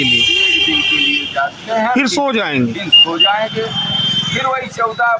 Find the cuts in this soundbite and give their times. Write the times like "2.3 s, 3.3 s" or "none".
none